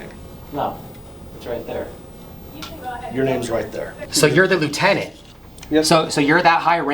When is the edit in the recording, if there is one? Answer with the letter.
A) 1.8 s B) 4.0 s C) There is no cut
B